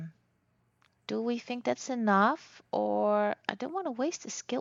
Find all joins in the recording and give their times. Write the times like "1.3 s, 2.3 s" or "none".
none